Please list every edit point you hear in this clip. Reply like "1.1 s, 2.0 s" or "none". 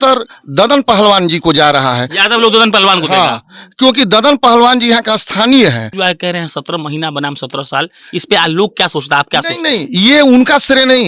5.9 s

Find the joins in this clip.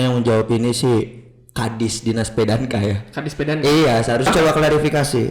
4.3 s

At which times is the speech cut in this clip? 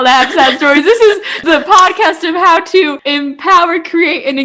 1.4 s, 3.0 s

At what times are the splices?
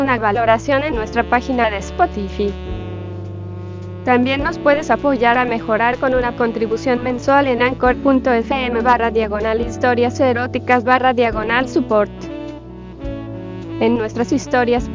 none

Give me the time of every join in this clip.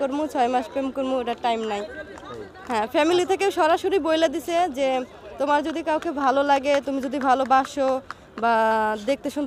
none

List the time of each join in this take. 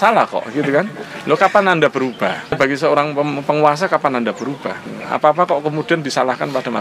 2.5 s, 4.8 s

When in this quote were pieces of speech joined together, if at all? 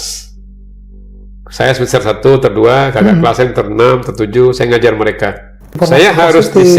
5.8 s

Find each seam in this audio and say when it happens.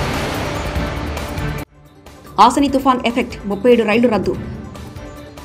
1.8 s

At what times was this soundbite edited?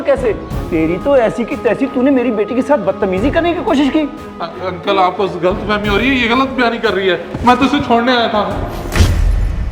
8.8 s

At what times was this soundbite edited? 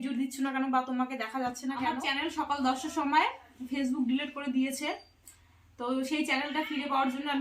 2.0 s

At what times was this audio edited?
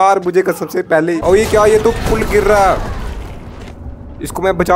1.2 s

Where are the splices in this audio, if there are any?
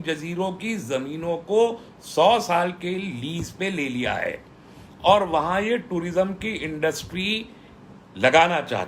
none

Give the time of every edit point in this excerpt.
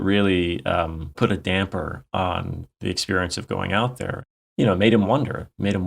1.2 s, 2.7 s, 4.2 s

